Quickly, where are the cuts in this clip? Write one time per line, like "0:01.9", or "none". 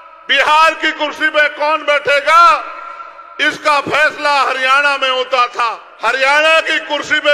0:05.9